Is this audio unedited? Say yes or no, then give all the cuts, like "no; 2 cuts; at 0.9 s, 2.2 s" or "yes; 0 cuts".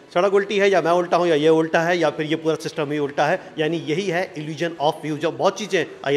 yes; 0 cuts